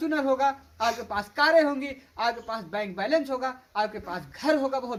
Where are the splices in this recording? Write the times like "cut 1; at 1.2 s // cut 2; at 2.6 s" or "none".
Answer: none